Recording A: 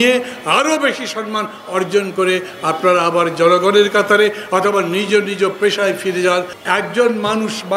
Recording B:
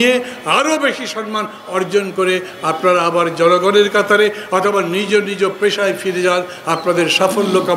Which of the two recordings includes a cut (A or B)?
A